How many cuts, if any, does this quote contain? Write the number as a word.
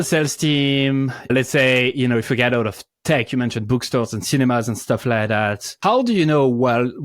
one